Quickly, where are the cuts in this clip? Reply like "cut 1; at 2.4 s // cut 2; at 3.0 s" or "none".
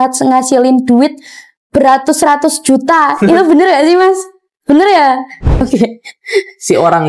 cut 1; at 5.6 s